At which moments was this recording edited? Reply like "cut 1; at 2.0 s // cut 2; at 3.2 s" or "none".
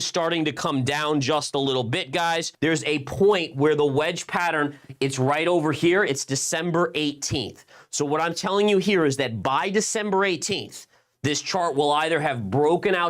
cut 1; at 2.5 s